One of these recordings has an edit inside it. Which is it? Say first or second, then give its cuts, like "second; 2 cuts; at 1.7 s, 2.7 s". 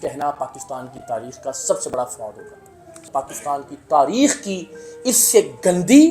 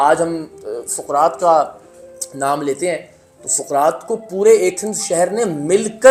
first; 1 cut; at 3.0 s